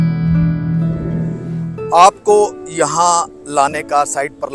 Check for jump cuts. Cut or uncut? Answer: cut